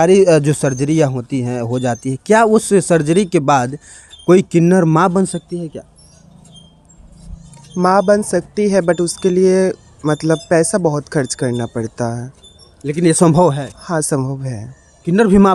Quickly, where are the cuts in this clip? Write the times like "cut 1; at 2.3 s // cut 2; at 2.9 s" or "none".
none